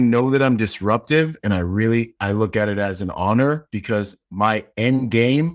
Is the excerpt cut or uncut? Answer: uncut